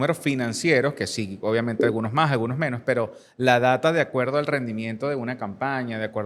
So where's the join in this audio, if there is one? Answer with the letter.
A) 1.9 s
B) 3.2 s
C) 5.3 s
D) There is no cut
D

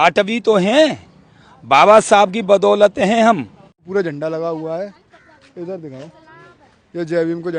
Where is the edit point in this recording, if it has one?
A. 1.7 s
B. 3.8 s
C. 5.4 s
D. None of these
B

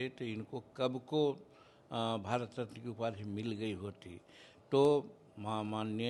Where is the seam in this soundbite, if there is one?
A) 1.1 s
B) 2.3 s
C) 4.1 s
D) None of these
D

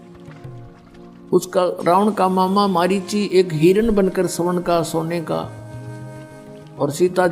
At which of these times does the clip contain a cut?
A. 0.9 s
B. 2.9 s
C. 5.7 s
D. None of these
A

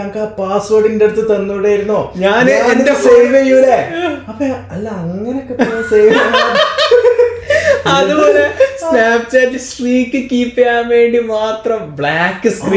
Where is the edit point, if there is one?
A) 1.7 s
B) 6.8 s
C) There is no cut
C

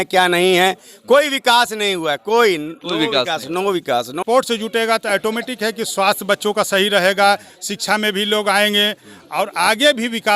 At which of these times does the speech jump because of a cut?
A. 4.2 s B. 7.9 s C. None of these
A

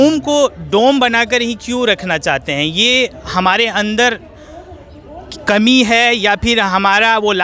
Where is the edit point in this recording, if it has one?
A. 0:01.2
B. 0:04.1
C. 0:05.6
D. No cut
D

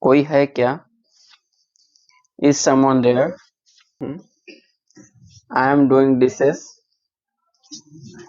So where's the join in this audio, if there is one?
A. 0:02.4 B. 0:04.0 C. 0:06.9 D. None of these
B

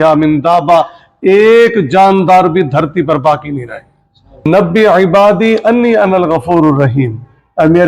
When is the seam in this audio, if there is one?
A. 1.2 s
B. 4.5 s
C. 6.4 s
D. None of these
B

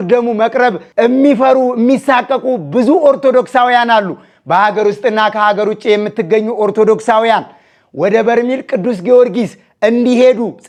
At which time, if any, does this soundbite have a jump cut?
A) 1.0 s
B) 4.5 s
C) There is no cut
C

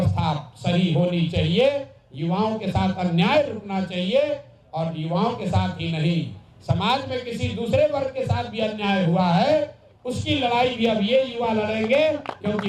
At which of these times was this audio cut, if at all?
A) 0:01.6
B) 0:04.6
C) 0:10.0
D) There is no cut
D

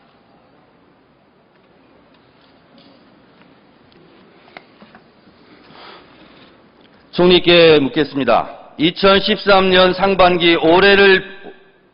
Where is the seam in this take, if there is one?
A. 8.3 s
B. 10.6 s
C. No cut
A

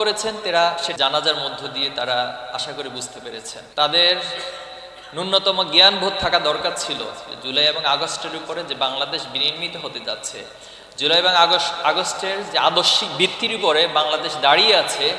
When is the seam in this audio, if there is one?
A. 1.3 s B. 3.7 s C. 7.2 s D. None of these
B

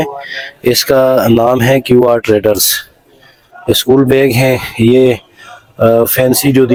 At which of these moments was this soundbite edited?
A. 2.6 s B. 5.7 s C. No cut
C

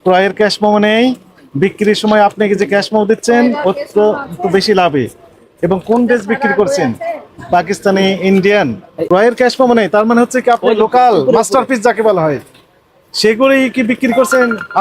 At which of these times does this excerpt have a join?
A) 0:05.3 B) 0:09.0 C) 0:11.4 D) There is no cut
B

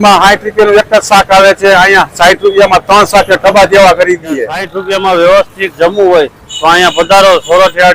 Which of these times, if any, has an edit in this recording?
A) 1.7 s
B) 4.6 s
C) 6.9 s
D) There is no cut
B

